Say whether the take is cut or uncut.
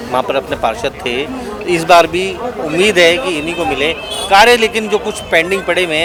uncut